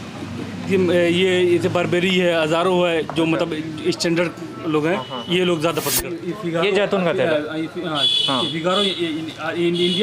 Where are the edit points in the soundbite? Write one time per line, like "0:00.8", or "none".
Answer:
0:06.1